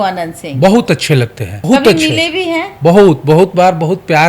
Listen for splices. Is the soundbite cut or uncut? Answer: cut